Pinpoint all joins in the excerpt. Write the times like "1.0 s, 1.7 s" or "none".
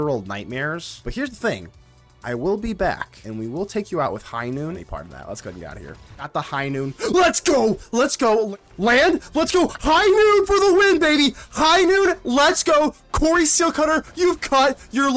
1.0 s, 3.2 s, 4.8 s, 6.3 s, 8.5 s